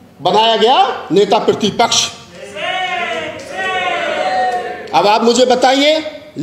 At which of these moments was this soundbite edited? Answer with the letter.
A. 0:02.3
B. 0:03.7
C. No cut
C